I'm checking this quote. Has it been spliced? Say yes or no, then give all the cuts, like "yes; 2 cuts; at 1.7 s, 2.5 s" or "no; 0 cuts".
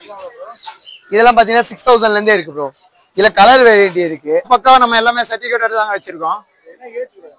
yes; 1 cut; at 4.5 s